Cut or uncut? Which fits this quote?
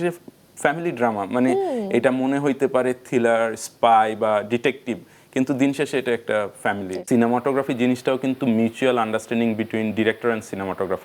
cut